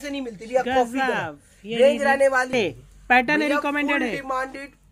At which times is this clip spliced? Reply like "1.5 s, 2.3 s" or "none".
2.5 s

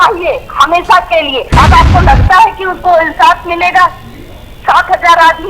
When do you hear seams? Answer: 1.4 s

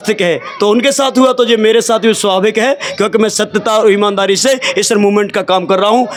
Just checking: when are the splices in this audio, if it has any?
none

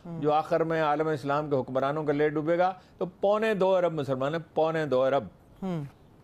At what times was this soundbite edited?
none

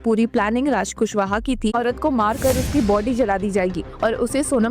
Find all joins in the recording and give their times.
1.7 s

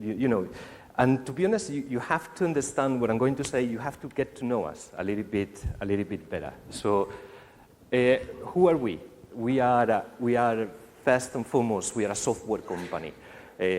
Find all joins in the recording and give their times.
8.3 s

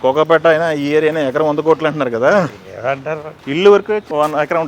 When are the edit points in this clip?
3.3 s

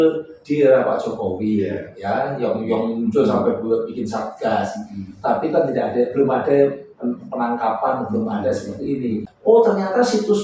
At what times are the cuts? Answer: 9.3 s

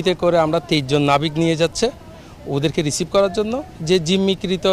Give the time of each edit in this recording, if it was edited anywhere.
none

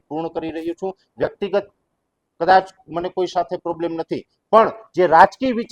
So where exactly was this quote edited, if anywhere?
none

